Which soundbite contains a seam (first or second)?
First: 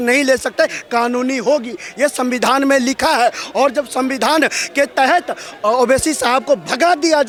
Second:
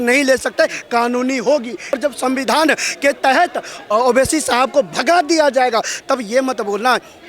second